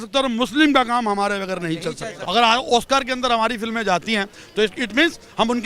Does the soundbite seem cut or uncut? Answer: cut